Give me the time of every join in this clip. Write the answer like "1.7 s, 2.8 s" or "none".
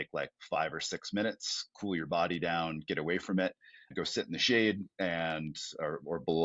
3.9 s